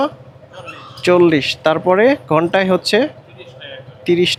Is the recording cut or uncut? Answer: uncut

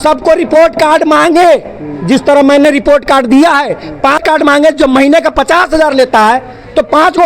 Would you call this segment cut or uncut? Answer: cut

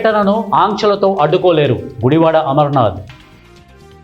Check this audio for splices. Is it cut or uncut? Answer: cut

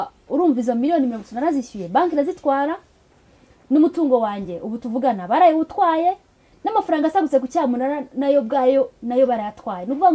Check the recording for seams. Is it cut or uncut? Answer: uncut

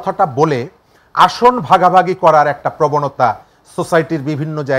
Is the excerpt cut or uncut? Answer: uncut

